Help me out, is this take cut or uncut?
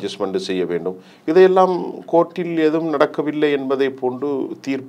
uncut